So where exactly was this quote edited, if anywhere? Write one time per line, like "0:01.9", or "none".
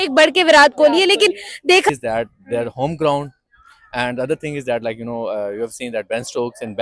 0:01.9